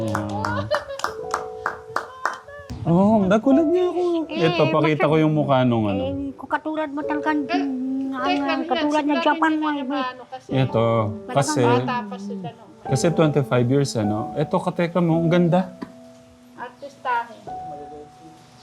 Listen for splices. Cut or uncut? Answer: cut